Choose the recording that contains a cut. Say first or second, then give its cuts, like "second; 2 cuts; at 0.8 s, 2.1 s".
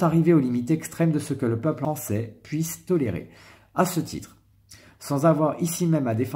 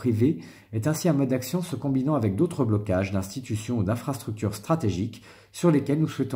first; 1 cut; at 1.8 s